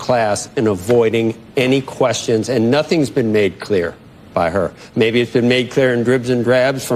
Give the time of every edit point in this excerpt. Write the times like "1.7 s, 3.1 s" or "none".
none